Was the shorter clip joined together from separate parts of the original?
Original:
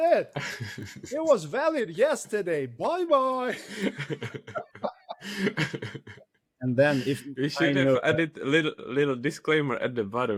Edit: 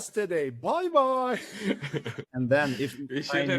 yes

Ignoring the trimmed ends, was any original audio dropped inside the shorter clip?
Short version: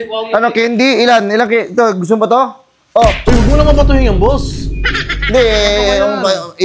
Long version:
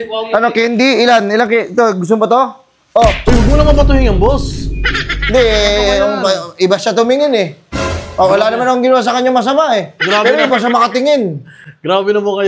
no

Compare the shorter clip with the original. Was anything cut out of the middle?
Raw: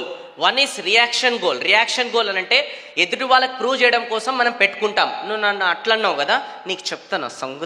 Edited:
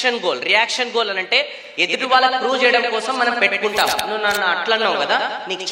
no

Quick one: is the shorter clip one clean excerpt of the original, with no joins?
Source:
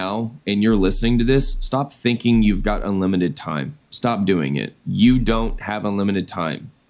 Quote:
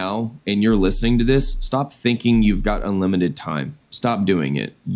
yes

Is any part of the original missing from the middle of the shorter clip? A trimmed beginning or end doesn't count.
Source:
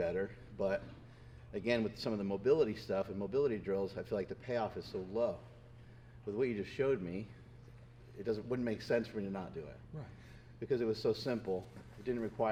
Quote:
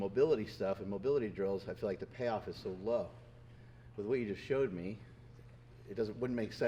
no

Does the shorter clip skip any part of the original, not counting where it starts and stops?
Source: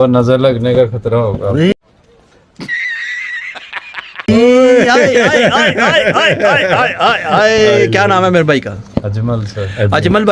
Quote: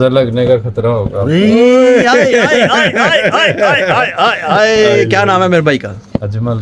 yes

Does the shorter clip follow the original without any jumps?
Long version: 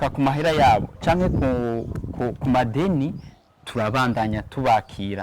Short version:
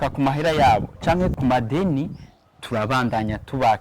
no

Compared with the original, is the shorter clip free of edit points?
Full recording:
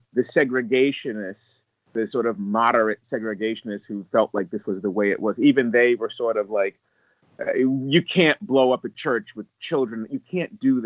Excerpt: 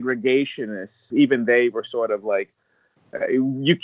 no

